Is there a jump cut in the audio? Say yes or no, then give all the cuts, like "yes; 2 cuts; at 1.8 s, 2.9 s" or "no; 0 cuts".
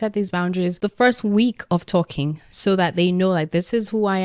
no; 0 cuts